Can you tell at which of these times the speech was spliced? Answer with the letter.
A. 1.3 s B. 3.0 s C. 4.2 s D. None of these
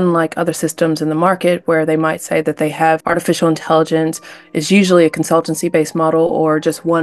B